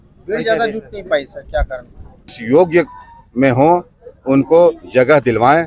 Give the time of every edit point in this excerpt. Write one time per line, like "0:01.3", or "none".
0:02.3